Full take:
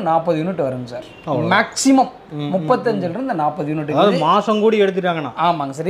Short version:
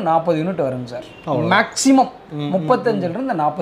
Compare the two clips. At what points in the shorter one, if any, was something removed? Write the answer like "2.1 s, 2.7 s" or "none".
none